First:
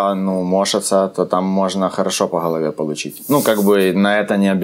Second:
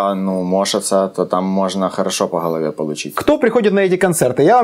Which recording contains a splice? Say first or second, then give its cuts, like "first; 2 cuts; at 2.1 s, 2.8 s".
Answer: second; 1 cut; at 3.2 s